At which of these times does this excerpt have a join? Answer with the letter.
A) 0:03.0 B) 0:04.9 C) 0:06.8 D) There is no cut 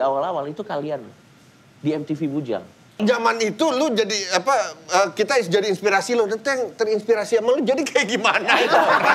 A